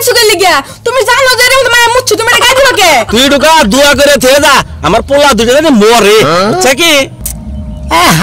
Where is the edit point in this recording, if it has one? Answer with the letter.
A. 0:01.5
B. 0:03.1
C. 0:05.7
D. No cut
B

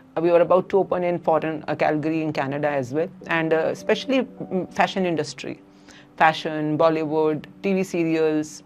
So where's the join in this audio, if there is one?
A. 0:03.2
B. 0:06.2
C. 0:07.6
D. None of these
A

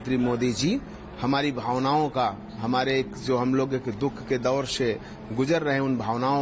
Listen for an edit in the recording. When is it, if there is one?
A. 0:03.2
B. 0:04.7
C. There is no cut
C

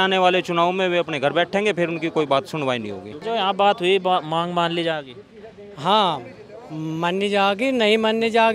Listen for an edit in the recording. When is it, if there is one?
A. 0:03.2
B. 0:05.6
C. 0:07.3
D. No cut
A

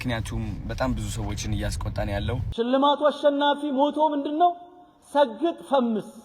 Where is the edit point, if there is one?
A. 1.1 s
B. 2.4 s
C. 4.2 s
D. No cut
B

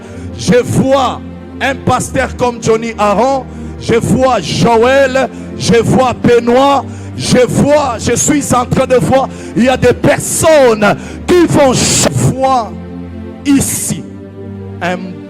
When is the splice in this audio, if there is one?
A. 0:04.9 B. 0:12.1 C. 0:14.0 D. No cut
B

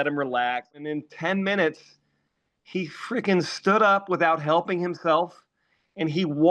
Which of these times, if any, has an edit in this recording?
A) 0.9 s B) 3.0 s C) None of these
A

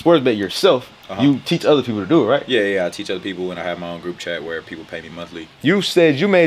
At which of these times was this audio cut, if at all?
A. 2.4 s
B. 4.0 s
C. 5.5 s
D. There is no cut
C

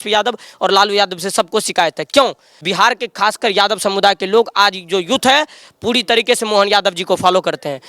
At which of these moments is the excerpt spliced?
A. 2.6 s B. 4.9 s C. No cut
A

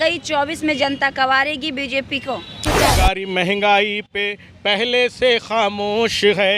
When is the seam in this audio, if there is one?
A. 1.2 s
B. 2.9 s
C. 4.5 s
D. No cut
B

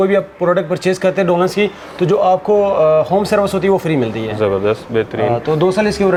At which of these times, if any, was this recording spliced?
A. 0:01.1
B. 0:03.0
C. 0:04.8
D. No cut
D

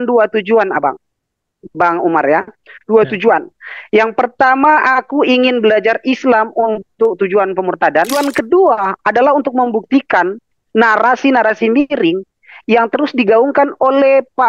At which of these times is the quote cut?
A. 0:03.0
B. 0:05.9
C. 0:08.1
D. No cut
C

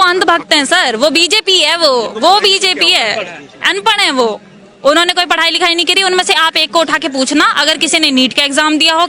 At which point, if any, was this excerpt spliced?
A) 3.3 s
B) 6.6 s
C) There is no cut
C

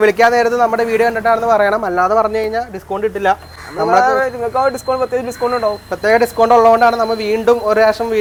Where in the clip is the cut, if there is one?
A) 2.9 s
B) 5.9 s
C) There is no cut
C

